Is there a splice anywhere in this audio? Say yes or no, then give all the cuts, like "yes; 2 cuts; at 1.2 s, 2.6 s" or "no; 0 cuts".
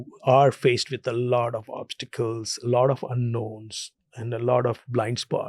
no; 0 cuts